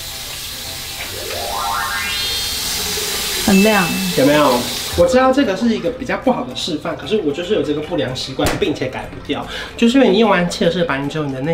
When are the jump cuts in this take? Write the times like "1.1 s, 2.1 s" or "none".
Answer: none